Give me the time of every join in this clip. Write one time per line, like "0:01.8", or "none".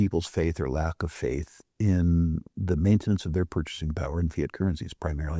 none